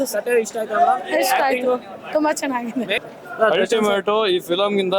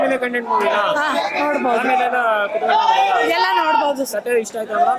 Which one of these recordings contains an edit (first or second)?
first